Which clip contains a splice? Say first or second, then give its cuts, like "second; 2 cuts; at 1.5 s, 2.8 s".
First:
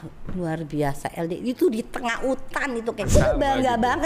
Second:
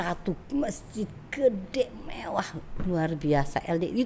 first; 1 cut; at 3.1 s